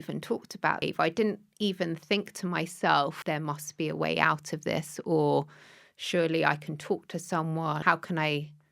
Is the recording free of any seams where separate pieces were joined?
no; 3 cuts; at 0.8 s, 3.2 s, 7.8 s

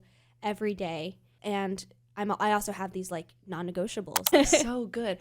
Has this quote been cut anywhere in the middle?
yes; 2 cuts; at 1.3 s, 4.3 s

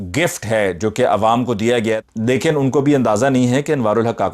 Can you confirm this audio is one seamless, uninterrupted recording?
no; 1 cut; at 2.0 s

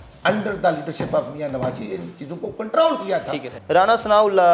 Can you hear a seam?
yes; 1 cut; at 3.5 s

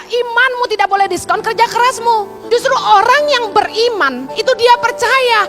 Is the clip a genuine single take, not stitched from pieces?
no; 2 cuts; at 2.3 s, 4.2 s

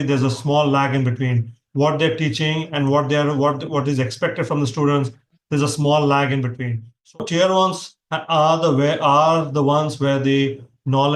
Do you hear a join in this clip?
yes; 1 cut; at 7.2 s

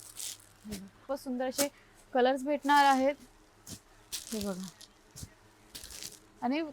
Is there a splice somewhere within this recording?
yes; 1 cut; at 1.0 s

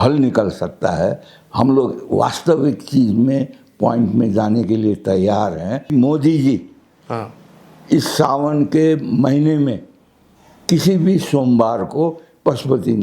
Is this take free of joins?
no; 1 cut; at 5.9 s

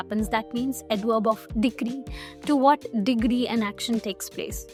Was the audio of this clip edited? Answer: no; 0 cuts

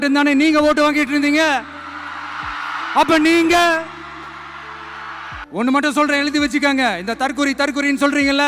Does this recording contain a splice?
yes; 1 cut; at 5.6 s

